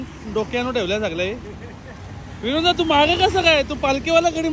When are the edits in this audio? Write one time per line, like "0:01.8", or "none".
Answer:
none

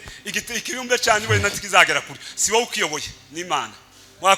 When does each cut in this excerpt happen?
none

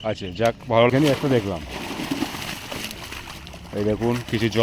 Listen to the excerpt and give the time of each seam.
0:00.9

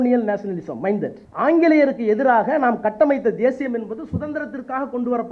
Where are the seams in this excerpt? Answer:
0:01.2

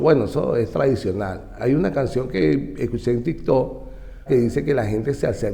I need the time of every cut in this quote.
0:04.2

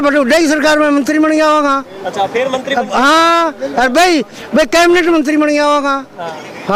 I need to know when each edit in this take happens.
none

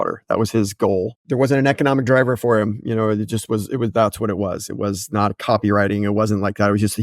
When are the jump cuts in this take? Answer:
0:01.2

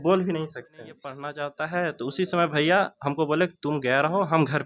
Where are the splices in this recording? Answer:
0:01.1

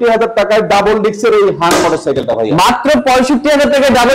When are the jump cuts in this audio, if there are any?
none

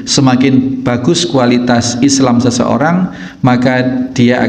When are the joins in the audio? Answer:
none

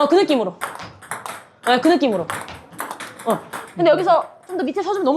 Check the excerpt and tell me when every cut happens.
0:03.6

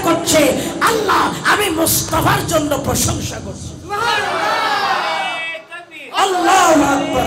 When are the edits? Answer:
none

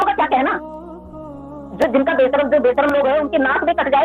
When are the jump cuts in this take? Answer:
none

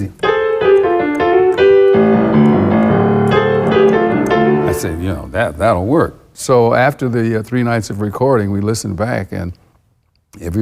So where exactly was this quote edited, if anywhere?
0:06.3

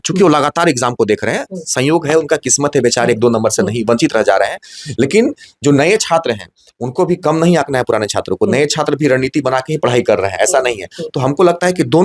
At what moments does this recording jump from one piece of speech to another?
none

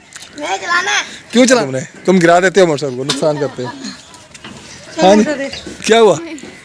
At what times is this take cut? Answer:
0:01.6

